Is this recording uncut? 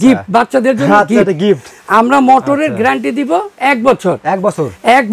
yes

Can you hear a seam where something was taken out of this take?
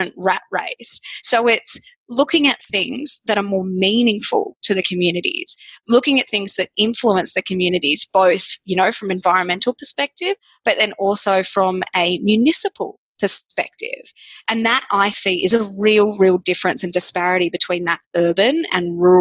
yes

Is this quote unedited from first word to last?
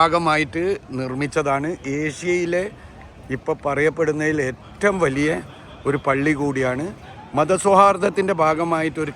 yes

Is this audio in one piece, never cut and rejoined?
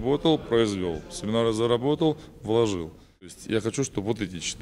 no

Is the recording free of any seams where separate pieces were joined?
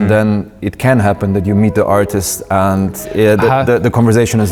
yes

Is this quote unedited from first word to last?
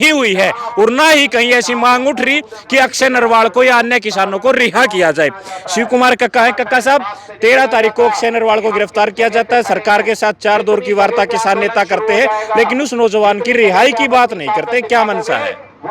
yes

